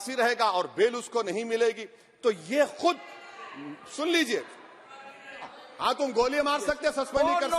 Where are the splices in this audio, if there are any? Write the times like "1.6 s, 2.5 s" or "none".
5.6 s